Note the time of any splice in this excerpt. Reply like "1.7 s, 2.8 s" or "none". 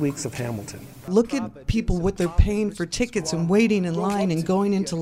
1.1 s